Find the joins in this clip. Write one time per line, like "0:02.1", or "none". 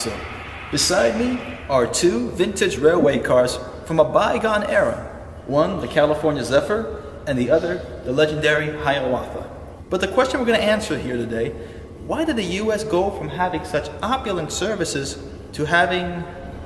none